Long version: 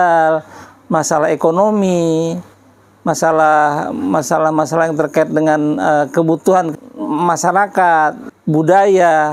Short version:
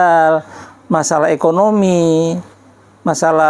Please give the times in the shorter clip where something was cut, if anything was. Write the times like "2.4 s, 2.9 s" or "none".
none